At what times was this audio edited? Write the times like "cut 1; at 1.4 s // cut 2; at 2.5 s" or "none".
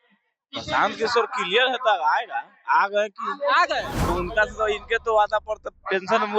cut 1; at 4.1 s